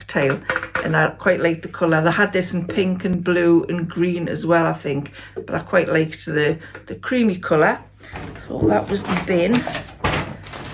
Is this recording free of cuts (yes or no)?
yes